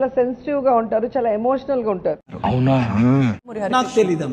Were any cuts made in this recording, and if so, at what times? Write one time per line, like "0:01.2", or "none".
0:02.3
0:03.4